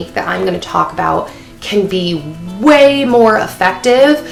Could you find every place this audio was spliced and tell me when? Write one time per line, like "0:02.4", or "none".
none

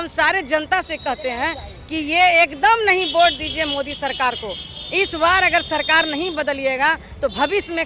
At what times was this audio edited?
none

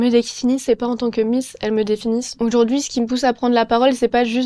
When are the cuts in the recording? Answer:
0:02.3

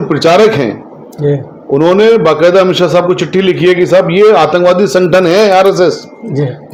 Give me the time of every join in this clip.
none

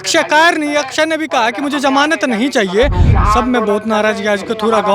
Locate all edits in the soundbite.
0:03.1

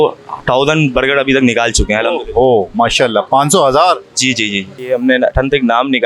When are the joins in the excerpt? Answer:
0:04.9

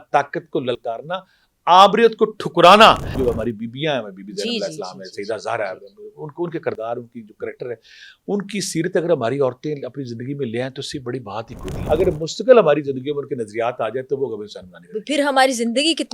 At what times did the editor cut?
0:03.1
0:11.7

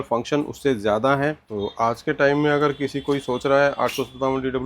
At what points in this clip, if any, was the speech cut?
0:01.5

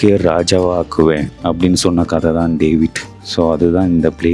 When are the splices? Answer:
0:01.3

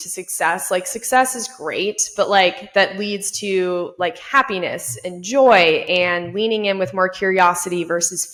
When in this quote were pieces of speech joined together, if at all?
none

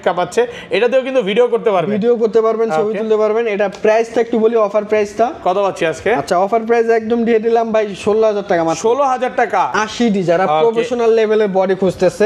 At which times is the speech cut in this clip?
0:09.7

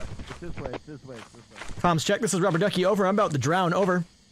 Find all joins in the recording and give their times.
none

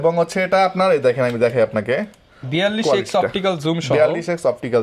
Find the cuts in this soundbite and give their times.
none

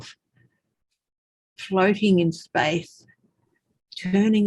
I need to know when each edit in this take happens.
none

